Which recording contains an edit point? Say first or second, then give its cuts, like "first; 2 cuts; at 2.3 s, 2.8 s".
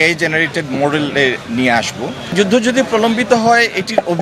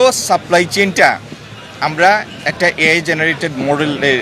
first; 1 cut; at 2.3 s